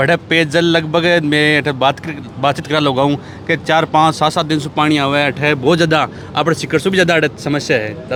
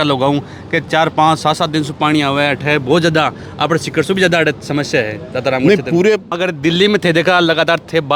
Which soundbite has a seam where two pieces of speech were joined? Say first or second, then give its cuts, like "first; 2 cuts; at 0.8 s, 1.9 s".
second; 1 cut; at 6.3 s